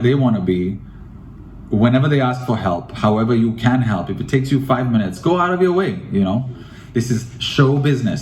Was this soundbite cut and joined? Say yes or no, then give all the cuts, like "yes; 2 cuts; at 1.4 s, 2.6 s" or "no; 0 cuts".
yes; 1 cut; at 6.7 s